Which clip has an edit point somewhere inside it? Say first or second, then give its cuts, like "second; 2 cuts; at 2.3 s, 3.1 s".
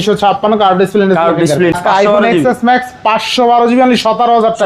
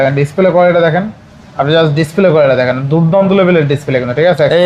first; 1 cut; at 1.7 s